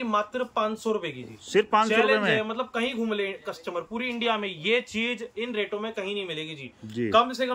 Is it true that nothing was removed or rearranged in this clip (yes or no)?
yes